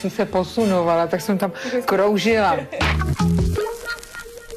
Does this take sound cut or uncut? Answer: cut